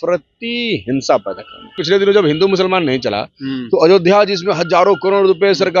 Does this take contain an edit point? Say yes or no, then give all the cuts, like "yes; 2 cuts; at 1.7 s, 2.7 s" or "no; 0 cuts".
yes; 1 cut; at 1.8 s